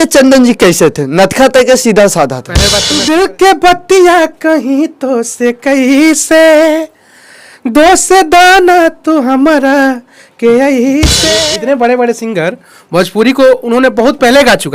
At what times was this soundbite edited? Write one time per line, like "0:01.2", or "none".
0:02.9
0:11.2